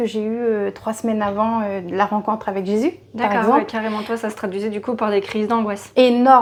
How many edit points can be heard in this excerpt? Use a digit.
0